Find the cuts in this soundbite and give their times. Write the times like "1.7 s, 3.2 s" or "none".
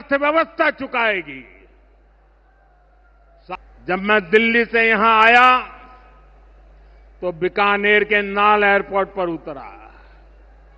3.5 s